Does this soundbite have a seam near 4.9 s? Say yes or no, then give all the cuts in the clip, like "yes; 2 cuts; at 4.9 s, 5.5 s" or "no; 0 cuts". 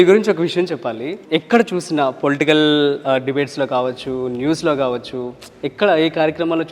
no; 1 cut; at 1.2 s